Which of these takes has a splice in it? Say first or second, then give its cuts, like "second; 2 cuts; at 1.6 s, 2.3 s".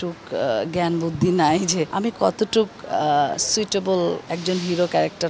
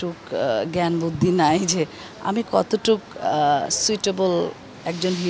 first; 2 cuts; at 1.9 s, 4.3 s